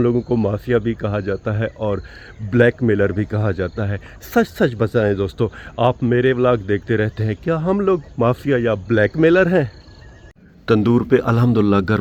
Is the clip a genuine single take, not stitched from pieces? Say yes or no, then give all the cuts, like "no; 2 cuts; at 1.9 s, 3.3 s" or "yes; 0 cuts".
yes; 0 cuts